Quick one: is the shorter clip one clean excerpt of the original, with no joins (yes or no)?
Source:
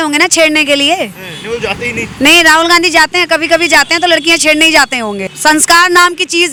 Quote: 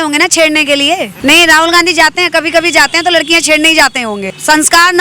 no